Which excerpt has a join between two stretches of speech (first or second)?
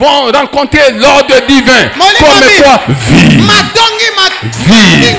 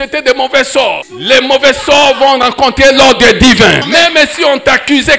second